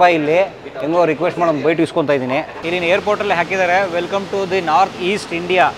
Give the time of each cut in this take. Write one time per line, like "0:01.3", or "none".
0:02.6